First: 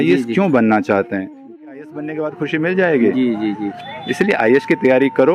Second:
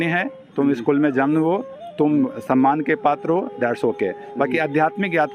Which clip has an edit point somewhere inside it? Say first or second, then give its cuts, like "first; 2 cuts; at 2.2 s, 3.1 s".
first; 1 cut; at 1.9 s